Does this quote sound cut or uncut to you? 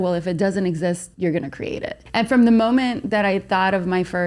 cut